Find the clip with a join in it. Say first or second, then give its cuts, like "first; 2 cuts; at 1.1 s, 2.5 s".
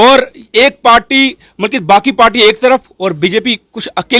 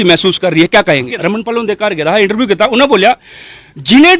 second; 1 cut; at 1.1 s